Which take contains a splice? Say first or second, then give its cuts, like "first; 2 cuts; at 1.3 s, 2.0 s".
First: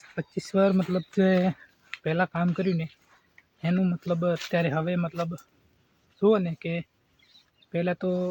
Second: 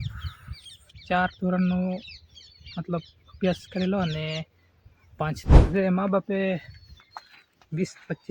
second; 1 cut; at 5.6 s